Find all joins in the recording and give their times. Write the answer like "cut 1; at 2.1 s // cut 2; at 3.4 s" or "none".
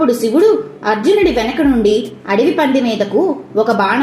none